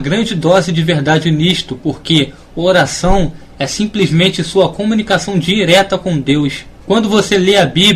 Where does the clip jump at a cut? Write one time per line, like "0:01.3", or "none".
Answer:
0:05.8